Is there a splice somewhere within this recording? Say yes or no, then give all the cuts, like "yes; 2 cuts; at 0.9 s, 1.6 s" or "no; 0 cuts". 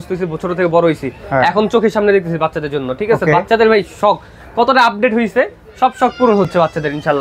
no; 0 cuts